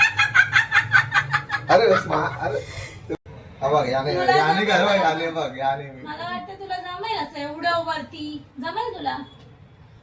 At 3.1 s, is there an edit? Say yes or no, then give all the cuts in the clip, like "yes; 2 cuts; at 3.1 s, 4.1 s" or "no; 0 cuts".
yes; 1 cut; at 3.1 s